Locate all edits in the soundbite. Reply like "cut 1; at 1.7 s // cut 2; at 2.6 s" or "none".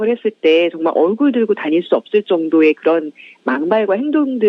cut 1; at 3.1 s